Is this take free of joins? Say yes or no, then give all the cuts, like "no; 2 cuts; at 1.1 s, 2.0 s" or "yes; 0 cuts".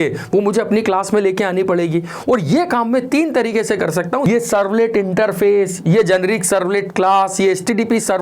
no; 1 cut; at 4.3 s